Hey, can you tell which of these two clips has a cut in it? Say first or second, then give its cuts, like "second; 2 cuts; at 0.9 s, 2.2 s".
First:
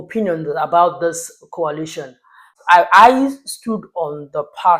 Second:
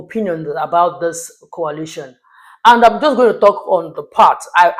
first; 1 cut; at 2.5 s